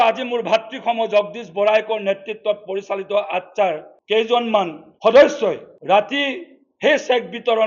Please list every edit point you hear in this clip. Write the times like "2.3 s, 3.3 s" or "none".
3.9 s, 4.8 s, 5.7 s